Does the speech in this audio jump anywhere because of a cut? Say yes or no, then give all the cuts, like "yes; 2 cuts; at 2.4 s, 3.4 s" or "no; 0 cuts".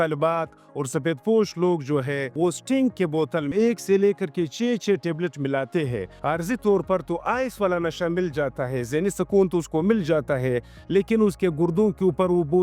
yes; 3 cuts; at 2.3 s, 3.5 s, 6.1 s